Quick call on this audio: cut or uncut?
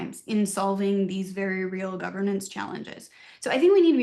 uncut